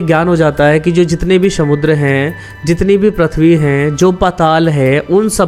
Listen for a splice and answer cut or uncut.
uncut